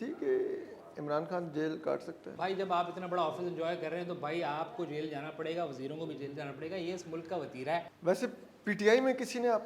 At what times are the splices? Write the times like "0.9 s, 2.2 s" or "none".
2.3 s, 7.9 s